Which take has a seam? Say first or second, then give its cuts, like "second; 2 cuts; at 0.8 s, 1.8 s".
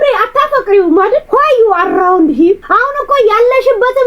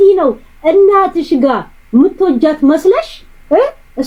first; 2 cuts; at 1.2 s, 2.6 s